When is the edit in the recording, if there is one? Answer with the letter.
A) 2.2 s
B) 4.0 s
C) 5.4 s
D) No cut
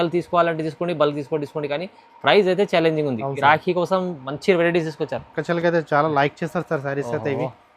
C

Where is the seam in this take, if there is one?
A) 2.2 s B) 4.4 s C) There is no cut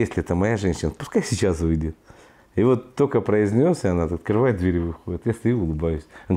C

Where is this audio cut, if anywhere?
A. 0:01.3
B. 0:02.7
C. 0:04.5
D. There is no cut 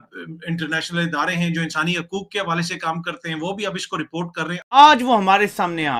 C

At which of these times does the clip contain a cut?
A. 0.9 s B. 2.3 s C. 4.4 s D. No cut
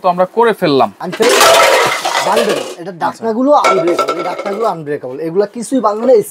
A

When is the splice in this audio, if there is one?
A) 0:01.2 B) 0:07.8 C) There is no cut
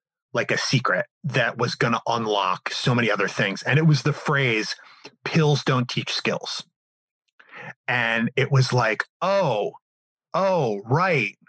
A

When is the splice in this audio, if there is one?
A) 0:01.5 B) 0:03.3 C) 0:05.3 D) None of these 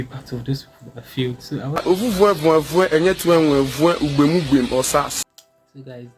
C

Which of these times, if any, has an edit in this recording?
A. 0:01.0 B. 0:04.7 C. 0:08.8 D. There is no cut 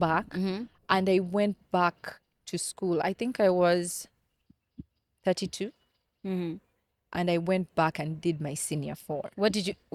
D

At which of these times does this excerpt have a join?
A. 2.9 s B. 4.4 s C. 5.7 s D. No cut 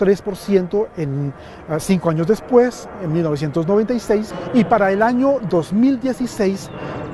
B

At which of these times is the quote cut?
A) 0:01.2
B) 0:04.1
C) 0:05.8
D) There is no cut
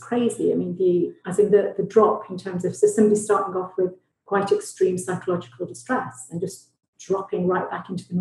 D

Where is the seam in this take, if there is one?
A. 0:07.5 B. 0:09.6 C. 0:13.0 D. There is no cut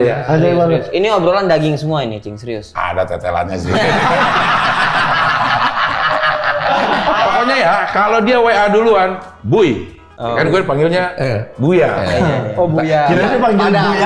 A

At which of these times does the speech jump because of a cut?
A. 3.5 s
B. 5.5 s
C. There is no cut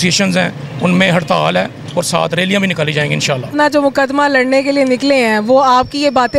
A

